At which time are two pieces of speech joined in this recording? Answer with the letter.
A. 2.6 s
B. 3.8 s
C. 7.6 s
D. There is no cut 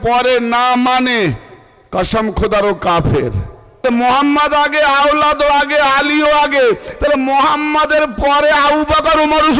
B